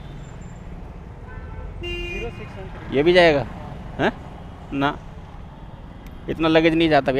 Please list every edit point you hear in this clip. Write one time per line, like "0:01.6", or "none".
none

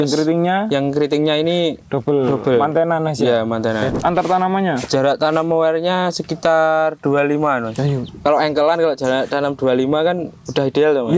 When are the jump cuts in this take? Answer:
0:01.9
0:03.9
0:08.0

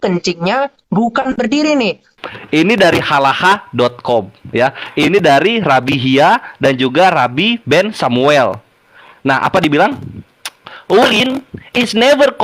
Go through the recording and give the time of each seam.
0:02.1

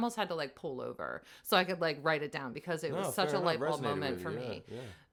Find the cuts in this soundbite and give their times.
none

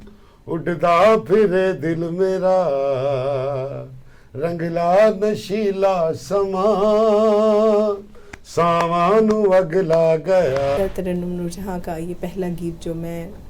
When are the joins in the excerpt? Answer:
0:10.8

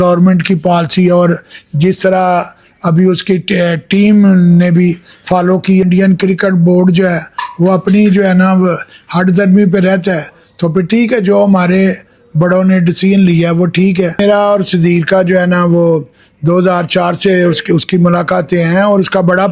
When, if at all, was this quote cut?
0:05.8
0:14.2

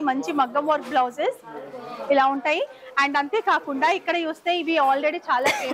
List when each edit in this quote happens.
none

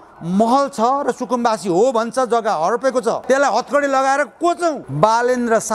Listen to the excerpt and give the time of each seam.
0:03.2
0:04.9

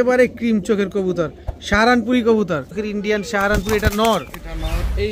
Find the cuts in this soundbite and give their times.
0:02.8

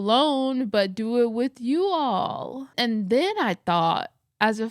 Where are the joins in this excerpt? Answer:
0:02.6

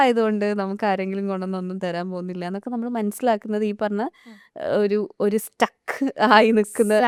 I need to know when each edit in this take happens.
none

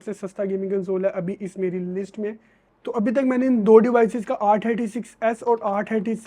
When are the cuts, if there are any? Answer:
0:02.7

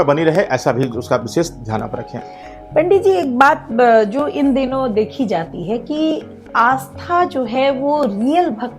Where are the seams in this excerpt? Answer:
none

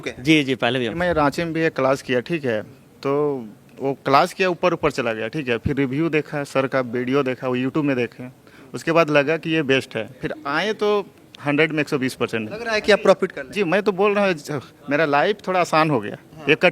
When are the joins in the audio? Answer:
0:01.0
0:12.5

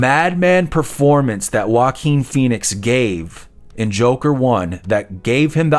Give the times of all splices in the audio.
none

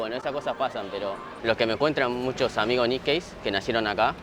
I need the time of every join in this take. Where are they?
0:01.3

